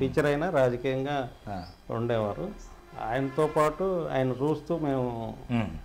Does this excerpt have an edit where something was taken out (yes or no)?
no